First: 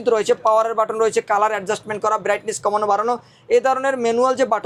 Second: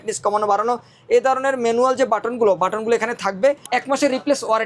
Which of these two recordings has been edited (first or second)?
second